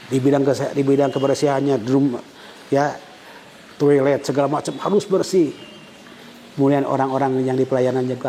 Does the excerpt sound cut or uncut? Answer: uncut